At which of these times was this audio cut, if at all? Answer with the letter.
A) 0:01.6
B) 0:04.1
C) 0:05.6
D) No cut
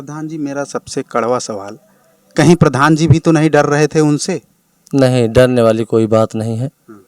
D